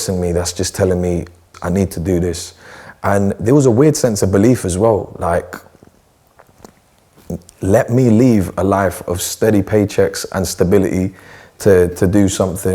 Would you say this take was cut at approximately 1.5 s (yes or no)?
yes